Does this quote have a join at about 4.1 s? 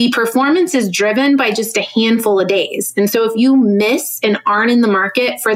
no; 0 cuts

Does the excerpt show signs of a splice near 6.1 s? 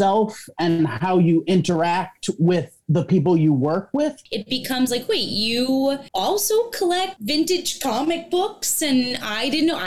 yes; 3 cuts; at 4.3 s, 6.1 s, 7.2 s

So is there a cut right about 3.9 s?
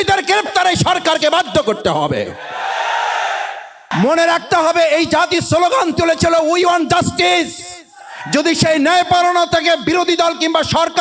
yes; 1 cut; at 3.9 s

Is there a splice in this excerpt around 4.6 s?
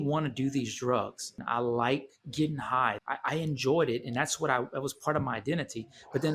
no; 2 cuts; at 1.4 s, 3.0 s

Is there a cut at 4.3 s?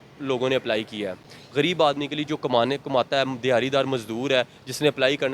no; 1 cut; at 1.4 s

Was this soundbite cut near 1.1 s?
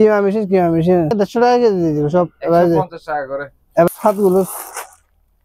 yes; 2 cuts; at 1.1 s, 3.9 s

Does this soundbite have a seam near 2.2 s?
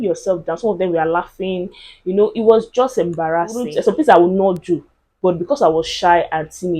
no; 1 cut; at 3.7 s

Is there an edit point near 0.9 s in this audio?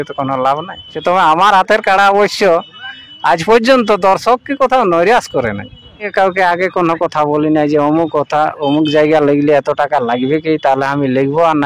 yes; 2 cuts; at 0.9 s, 6.1 s

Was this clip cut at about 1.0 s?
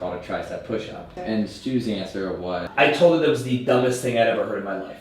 yes; 2 cuts; at 1.0 s, 2.6 s

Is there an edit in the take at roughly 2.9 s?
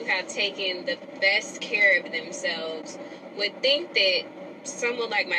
no; 0 cuts

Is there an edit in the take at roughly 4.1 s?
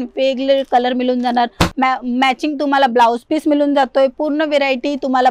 no; 1 cut; at 1.7 s

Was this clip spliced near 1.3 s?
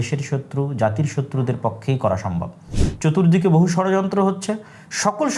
no; 1 cut; at 2.8 s

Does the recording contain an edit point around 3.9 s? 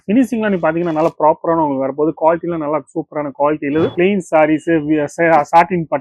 yes; 1 cut; at 3.9 s

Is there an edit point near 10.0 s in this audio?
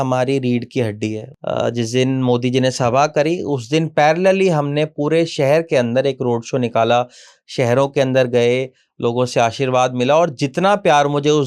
no; 1 cut; at 1.3 s

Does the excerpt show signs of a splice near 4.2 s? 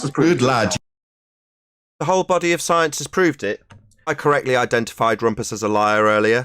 yes; 2 cuts; at 0.7 s, 4.2 s

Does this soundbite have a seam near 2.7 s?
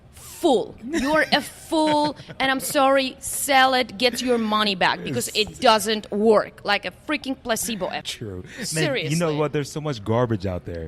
no; 1 cut; at 8.1 s

